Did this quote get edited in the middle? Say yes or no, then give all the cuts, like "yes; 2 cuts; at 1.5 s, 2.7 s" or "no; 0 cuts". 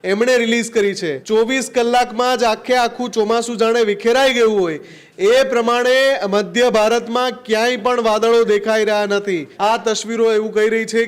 yes; 2 cuts; at 1.1 s, 9.5 s